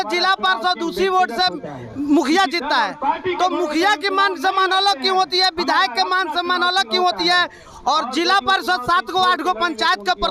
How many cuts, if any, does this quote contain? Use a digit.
0